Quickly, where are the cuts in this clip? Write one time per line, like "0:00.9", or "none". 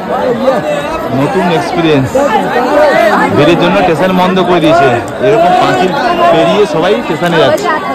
none